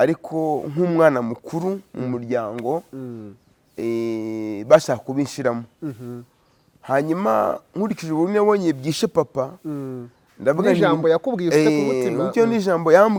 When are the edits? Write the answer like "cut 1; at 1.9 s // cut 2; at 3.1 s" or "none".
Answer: none

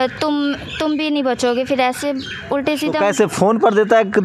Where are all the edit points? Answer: none

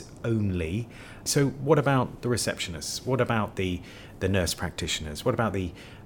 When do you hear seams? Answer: cut 1; at 1.2 s

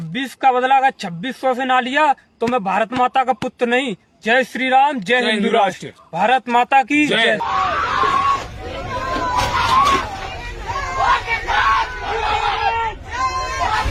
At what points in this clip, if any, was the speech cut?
none

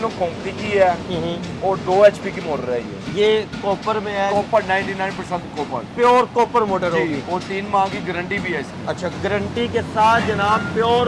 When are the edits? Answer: none

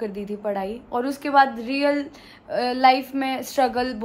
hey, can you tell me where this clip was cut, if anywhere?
none

